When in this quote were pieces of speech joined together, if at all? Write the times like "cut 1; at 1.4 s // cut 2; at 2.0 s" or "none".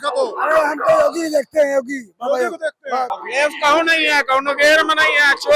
cut 1; at 3.2 s